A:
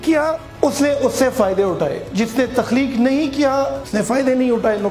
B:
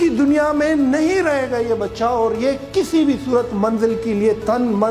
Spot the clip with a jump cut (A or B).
A